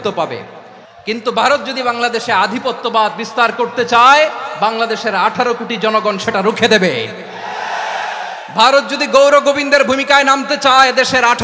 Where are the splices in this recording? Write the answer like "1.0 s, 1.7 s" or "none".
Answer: none